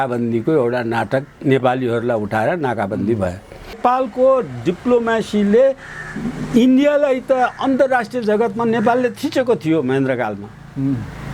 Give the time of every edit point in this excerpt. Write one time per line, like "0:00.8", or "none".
0:03.8